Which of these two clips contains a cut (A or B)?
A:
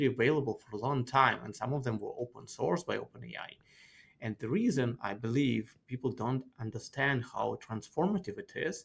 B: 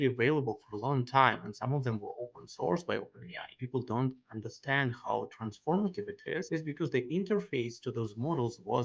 B